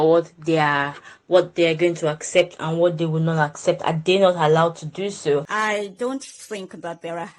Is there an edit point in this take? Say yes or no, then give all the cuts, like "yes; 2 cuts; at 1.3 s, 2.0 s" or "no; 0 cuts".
yes; 1 cut; at 5.5 s